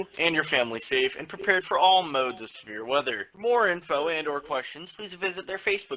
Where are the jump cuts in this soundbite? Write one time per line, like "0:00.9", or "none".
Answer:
none